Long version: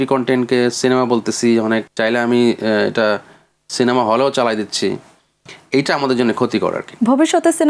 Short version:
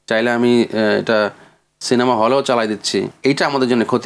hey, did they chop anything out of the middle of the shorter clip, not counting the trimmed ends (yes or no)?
yes